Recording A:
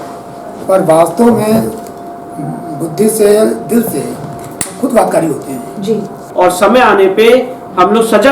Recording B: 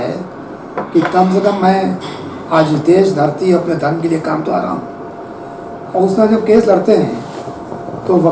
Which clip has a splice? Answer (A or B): A